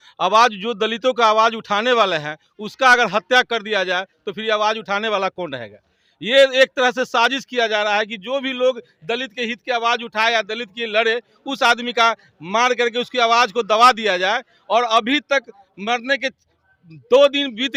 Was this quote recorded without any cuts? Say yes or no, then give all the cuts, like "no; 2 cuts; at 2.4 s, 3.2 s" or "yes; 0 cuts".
yes; 0 cuts